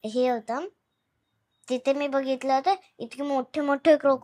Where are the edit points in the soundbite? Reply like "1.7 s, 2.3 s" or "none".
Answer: none